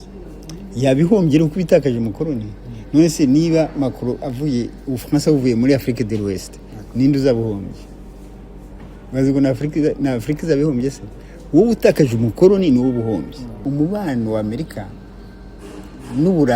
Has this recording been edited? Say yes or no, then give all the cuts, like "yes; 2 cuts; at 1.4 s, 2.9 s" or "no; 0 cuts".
yes; 1 cut; at 13.6 s